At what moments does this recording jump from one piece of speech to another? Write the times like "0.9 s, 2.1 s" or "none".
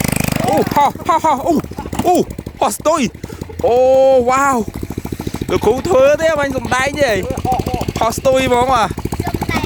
none